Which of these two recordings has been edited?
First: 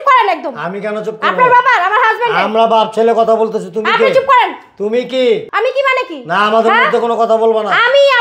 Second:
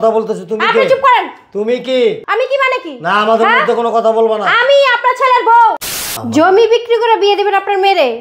second; 1 cut; at 5.9 s

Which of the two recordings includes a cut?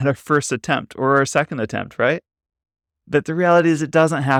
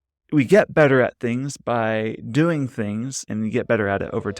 second; 1 cut; at 3.2 s

